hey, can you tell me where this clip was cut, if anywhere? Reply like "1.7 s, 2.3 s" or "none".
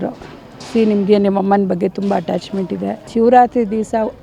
3.0 s

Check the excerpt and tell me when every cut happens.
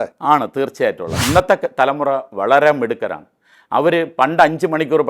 1.2 s

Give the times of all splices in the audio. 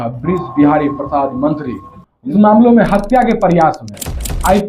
2.3 s

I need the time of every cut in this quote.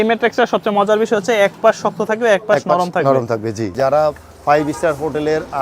3.7 s

